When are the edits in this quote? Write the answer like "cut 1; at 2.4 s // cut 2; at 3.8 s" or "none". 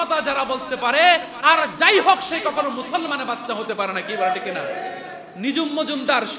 none